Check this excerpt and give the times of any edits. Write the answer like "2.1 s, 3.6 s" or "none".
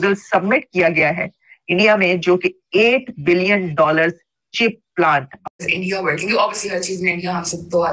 5.5 s

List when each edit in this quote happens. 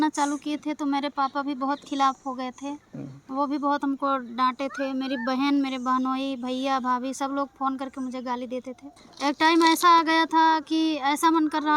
8.9 s

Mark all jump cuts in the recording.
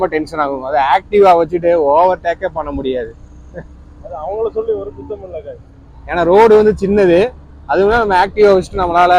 none

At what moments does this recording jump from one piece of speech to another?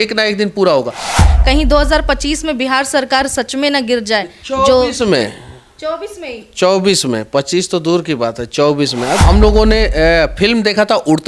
1.2 s, 9.2 s

